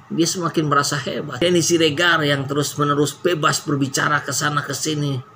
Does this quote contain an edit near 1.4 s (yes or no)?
yes